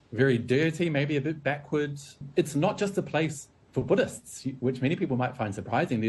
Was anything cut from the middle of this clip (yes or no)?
yes